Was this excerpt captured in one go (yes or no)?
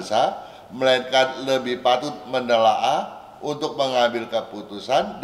yes